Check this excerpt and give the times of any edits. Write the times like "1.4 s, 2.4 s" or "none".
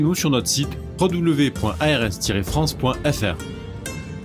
3.4 s